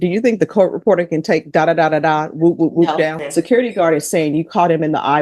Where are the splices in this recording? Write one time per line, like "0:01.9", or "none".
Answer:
0:03.2